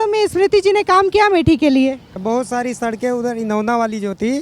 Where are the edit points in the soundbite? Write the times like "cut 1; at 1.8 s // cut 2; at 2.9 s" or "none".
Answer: cut 1; at 2.2 s